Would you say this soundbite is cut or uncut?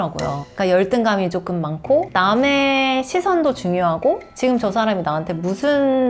uncut